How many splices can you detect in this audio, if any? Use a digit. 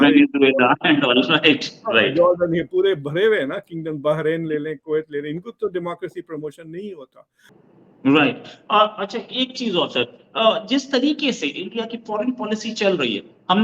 1